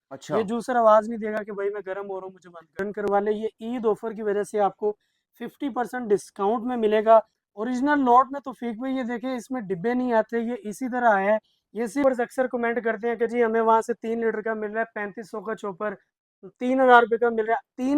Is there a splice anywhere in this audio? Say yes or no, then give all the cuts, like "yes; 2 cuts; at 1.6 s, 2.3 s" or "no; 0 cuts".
yes; 2 cuts; at 2.8 s, 12.0 s